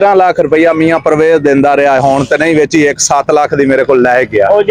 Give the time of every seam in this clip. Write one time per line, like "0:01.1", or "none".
none